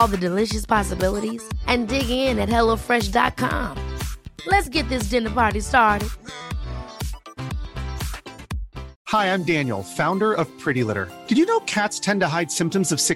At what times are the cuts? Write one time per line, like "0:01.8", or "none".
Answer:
0:09.0